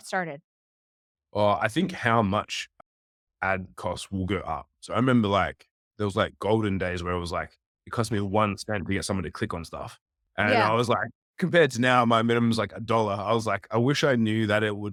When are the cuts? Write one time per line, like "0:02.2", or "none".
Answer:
none